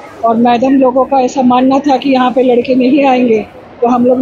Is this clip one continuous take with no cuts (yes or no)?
yes